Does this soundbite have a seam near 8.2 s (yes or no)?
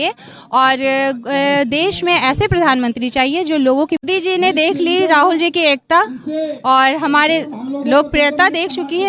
no